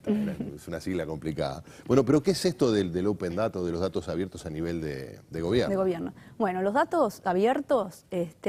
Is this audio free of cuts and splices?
no; 1 cut; at 6.2 s

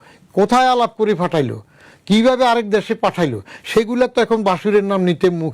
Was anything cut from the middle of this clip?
no; 0 cuts

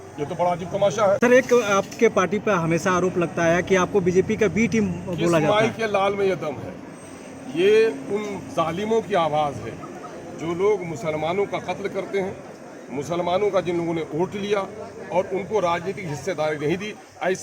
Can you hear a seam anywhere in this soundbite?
yes; 1 cut; at 1.2 s

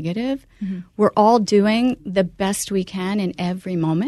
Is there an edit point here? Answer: no; 0 cuts

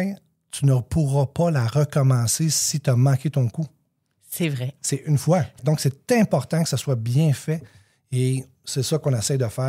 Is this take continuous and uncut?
no; 1 cut; at 5.6 s

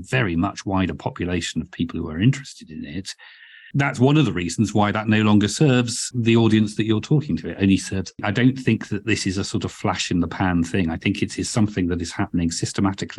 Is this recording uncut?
no; 3 cuts; at 3.6 s, 6.1 s, 8.2 s

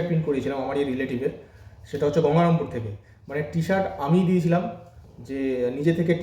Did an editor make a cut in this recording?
no; 0 cuts

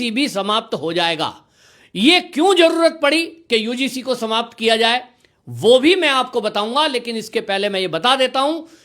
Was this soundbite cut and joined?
no; 0 cuts

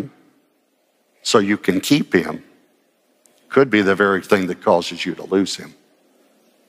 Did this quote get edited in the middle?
no; 0 cuts

